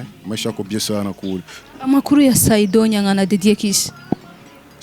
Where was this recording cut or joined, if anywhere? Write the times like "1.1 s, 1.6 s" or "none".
1.6 s